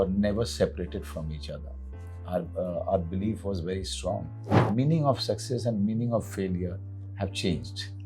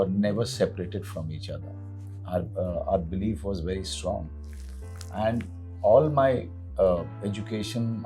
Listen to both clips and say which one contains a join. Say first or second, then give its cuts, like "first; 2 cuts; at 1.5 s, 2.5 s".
first; 1 cut; at 4.5 s